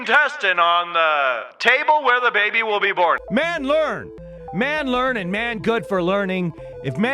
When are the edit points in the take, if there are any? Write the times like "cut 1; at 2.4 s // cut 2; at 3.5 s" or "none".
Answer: cut 1; at 1.5 s // cut 2; at 3.2 s